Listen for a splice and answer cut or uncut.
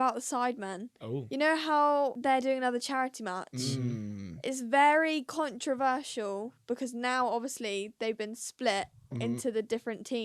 cut